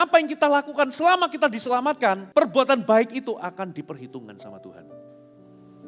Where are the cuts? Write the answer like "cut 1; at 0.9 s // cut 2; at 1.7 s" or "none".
cut 1; at 2.2 s